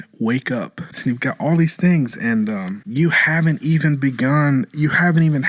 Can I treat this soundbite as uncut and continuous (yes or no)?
no